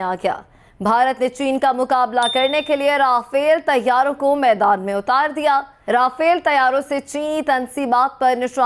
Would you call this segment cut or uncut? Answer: cut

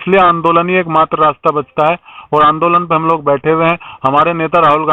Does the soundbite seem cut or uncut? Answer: uncut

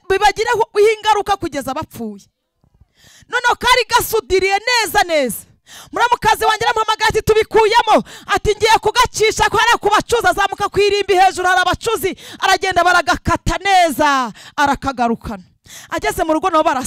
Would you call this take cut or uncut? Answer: uncut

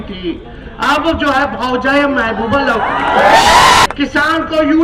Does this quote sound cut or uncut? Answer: cut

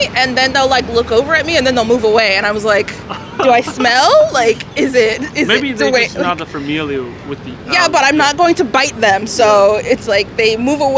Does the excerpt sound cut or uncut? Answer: uncut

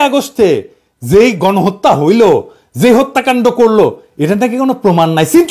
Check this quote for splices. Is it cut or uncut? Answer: uncut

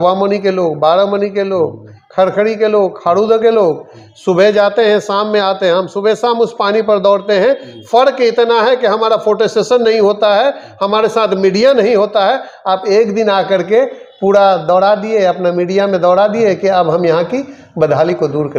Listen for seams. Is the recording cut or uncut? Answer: uncut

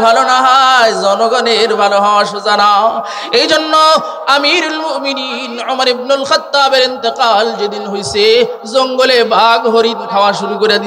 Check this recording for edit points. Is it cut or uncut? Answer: uncut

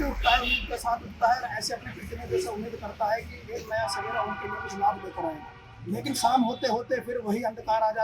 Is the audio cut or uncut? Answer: uncut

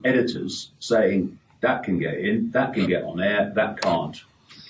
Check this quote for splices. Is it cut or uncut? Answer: uncut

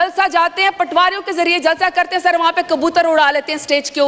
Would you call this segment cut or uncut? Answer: uncut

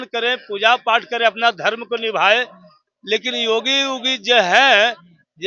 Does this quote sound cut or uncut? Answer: uncut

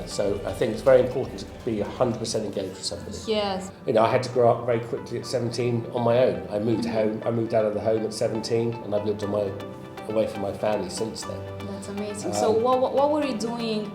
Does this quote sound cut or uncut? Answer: cut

